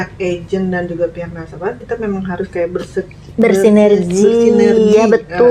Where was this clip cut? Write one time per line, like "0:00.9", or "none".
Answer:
none